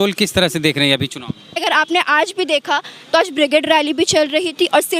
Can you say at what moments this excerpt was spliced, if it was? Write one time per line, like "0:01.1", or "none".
0:01.6